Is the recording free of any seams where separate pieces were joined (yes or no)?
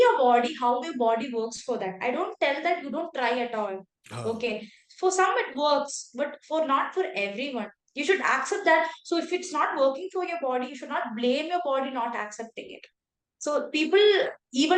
yes